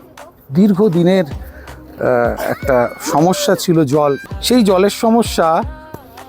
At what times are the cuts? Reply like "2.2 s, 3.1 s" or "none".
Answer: 4.2 s